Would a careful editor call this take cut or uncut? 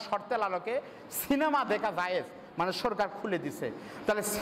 uncut